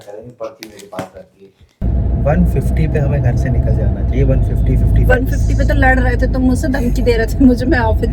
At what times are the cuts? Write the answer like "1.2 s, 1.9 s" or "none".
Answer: 1.8 s